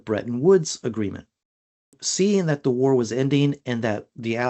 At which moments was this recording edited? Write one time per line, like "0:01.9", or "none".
0:01.9

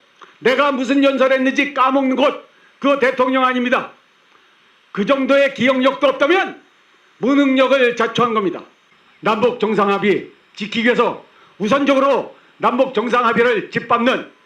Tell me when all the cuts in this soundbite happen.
0:08.9

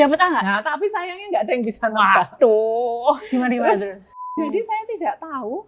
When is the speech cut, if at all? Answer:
0:04.1

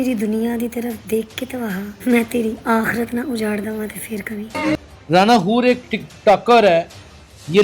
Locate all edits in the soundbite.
0:04.9

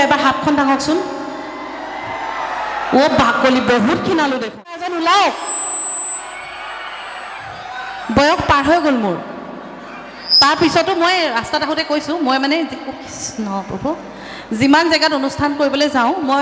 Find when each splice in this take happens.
0:04.8

